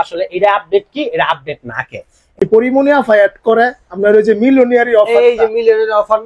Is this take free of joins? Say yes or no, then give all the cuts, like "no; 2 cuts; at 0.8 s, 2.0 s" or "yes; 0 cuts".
no; 1 cut; at 2.4 s